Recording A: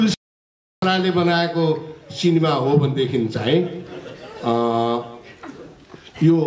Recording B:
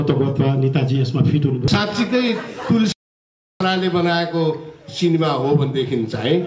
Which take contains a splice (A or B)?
B